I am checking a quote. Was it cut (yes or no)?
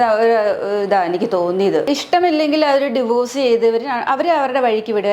yes